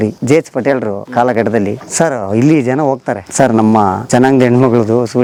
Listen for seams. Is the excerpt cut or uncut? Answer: uncut